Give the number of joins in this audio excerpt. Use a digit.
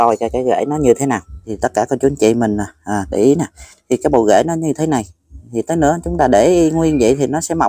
1